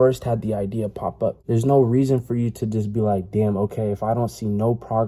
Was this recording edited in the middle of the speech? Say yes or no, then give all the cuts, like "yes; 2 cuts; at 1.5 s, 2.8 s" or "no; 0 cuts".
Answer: yes; 1 cut; at 1.4 s